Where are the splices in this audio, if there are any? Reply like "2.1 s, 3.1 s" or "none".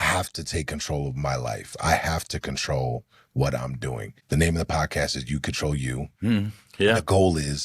4.1 s

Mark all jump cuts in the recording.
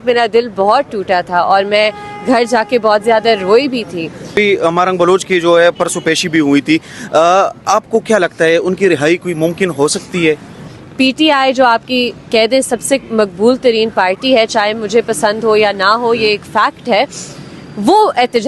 4.3 s, 10.8 s

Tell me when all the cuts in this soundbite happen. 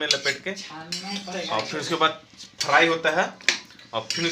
none

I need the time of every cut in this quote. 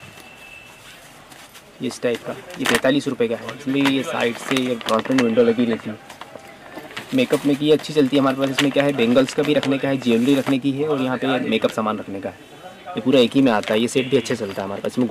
none

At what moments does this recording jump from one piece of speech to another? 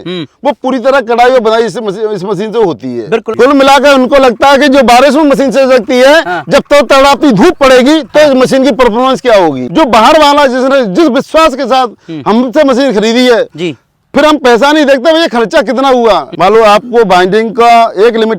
2.9 s, 9.6 s, 16.3 s

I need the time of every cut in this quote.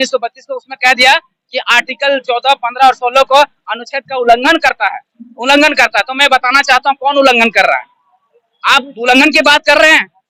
none

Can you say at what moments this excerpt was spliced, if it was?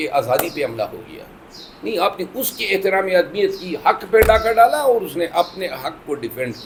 none

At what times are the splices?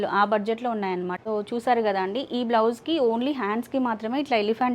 1.1 s

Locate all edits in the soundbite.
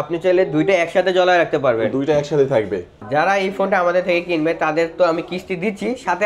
3.0 s

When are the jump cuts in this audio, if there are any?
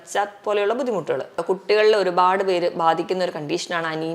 1.4 s

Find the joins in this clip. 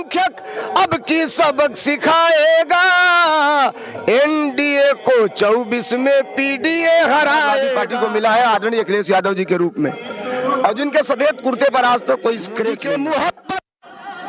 7.8 s, 12.8 s

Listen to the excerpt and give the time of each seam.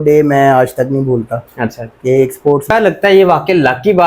2.7 s

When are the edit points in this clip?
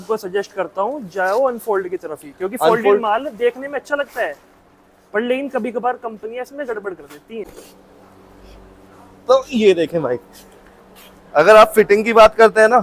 7.5 s

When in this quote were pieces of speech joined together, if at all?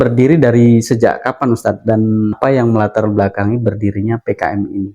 2.4 s

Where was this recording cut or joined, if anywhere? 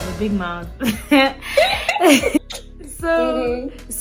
none

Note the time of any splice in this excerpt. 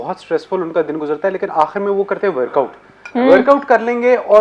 none

